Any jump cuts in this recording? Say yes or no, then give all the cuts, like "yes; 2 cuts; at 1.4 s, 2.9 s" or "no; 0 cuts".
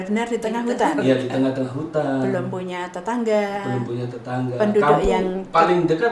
no; 0 cuts